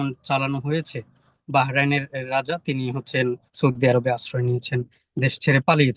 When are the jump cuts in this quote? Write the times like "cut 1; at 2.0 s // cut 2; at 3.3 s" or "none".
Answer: none